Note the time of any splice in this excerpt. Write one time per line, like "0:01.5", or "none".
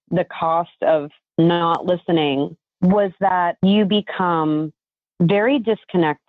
0:01.2
0:02.6
0:03.5

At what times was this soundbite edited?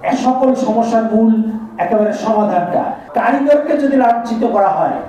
0:03.0

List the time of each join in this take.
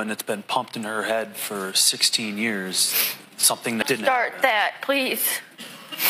none

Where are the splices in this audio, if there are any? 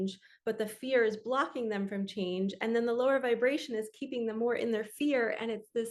none

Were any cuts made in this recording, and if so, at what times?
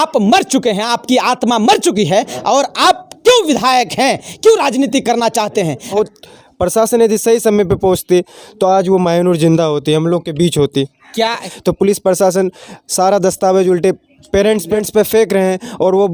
0:06.0
0:11.5
0:14.8

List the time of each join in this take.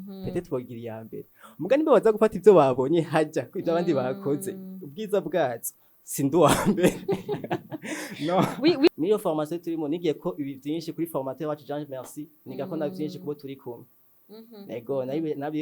0:08.9

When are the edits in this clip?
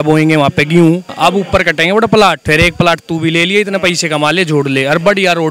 0:01.1
0:02.4

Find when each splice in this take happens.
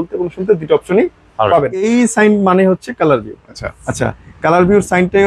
0:01.9

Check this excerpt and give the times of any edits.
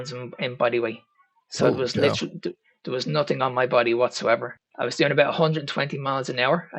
0:04.6

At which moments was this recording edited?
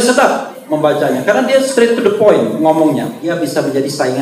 0:03.2

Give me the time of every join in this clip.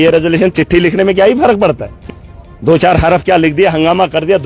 none

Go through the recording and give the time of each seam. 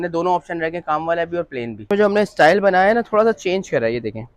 0:01.8

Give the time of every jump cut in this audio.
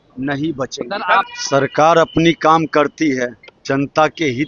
0:01.3

